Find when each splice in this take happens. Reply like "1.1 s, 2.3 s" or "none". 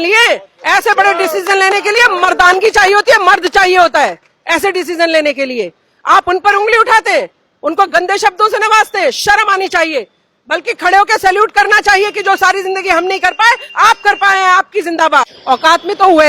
15.3 s